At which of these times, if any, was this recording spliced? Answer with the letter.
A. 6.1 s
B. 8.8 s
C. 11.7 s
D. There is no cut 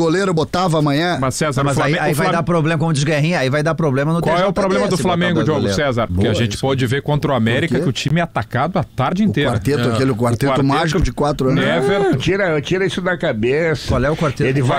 A